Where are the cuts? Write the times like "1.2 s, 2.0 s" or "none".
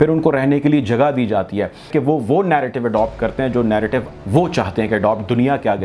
1.9 s